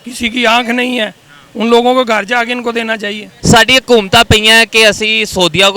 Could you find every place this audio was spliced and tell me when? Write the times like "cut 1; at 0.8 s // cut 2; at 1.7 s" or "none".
cut 1; at 3.3 s